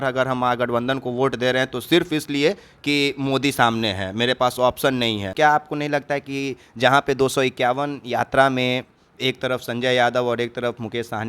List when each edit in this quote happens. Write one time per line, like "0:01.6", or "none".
0:05.3